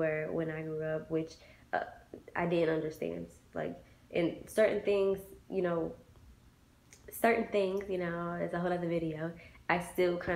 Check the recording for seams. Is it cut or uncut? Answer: uncut